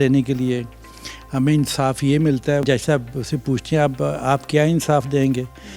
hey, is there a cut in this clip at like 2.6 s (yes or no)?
yes